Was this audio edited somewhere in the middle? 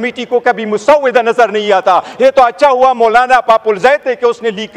no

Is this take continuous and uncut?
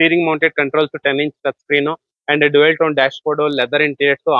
yes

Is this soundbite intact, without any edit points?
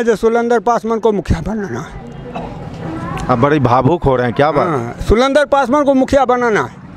yes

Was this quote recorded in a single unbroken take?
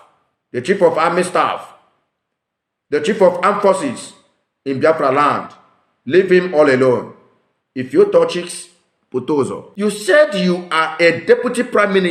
no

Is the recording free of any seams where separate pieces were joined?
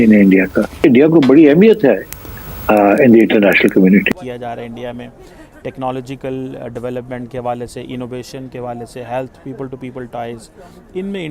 no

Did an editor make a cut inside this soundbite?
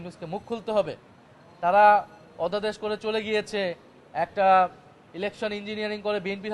no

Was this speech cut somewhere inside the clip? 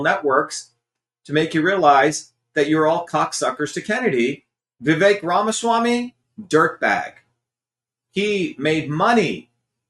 yes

